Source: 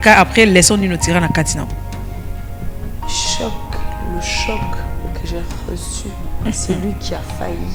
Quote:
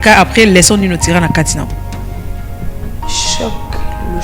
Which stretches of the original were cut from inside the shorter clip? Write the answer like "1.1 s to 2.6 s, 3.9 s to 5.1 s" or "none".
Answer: none